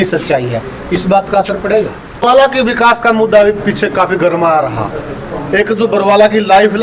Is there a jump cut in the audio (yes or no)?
yes